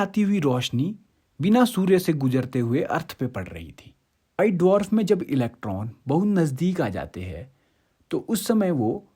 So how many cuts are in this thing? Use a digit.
1